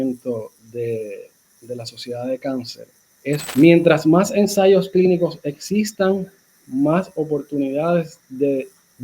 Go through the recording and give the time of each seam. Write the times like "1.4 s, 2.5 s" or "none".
3.5 s